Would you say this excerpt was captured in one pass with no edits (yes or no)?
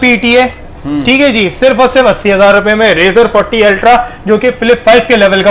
yes